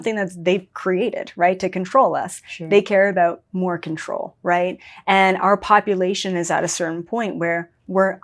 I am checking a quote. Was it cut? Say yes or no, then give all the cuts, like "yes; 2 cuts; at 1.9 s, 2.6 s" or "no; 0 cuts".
no; 0 cuts